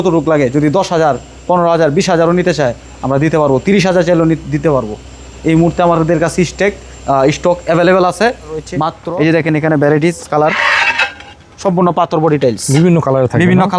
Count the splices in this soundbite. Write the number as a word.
one